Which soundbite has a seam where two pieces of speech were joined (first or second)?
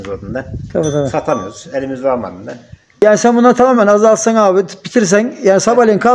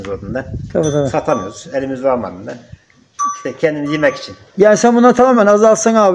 first